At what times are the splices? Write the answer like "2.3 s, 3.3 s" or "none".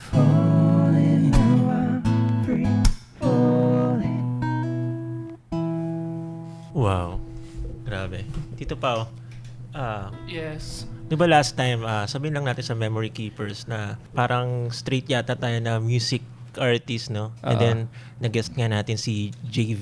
6.6 s, 14.0 s, 16.6 s